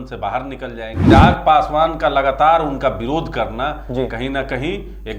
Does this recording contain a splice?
yes; 1 cut; at 1.0 s

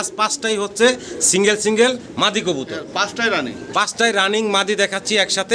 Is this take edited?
no; 0 cuts

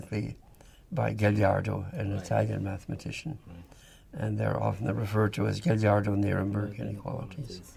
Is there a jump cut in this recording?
no; 0 cuts

